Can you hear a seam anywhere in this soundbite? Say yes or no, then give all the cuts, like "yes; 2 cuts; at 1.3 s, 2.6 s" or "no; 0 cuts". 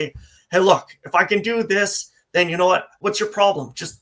yes; 1 cut; at 3.0 s